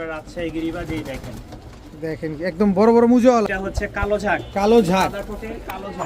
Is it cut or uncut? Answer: cut